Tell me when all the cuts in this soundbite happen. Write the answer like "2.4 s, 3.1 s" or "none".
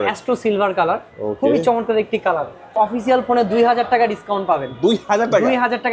2.8 s